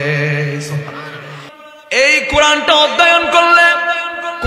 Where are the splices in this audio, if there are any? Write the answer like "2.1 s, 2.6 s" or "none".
1.4 s

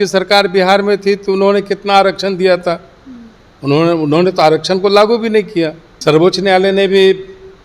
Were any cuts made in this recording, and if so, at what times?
5.9 s

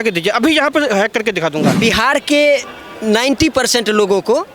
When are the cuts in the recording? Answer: 1.8 s

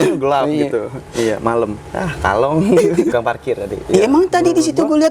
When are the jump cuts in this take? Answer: 3.1 s

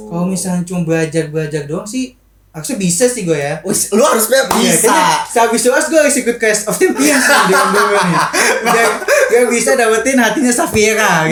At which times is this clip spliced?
none

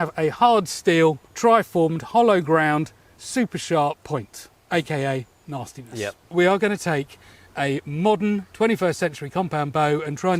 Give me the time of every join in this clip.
1.3 s, 4.0 s, 6.3 s

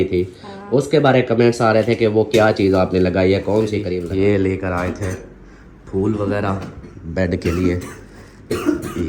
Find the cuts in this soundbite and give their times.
3.9 s

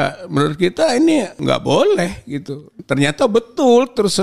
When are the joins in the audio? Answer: 1.4 s, 2.8 s

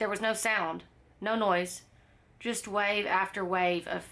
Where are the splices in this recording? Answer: none

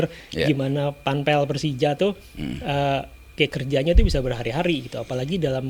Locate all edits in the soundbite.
none

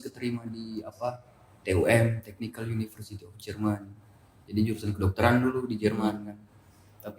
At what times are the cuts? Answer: none

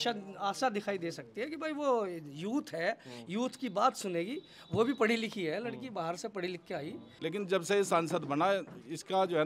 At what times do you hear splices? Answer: 7.0 s

